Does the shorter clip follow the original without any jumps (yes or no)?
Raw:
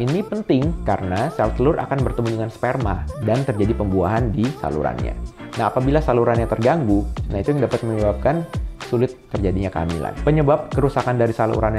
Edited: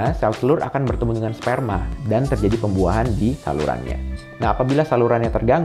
yes